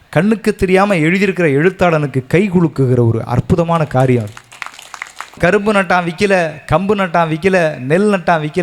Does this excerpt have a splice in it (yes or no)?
yes